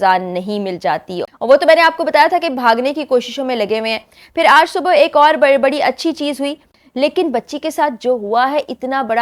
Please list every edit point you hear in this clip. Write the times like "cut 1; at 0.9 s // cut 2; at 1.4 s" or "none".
cut 1; at 1.2 s // cut 2; at 6.7 s